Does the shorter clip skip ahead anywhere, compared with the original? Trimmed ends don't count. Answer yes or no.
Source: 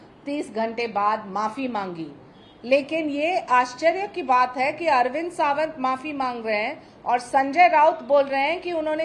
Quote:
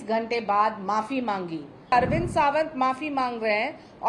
yes